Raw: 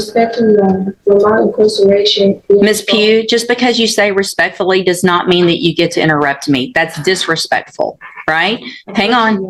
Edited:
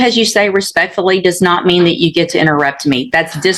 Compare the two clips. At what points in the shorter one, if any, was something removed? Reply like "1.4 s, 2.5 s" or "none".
none